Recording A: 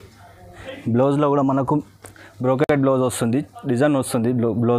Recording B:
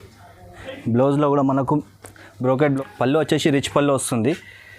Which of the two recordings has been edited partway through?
B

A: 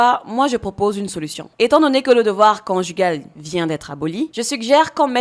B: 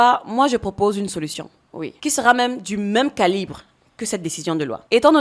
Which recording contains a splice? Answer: A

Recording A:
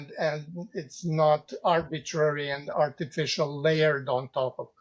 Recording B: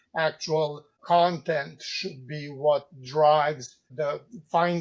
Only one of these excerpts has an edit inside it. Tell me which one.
B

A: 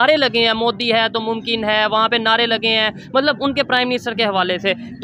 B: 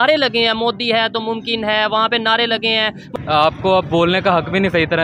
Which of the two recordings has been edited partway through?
B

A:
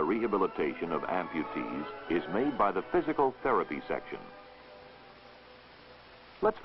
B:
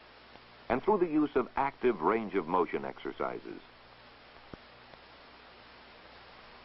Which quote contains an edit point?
B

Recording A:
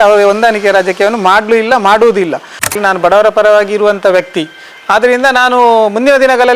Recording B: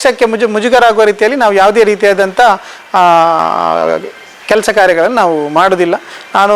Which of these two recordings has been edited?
A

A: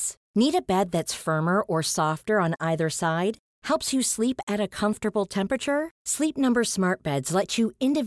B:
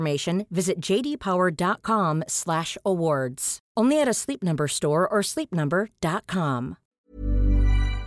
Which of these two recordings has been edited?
B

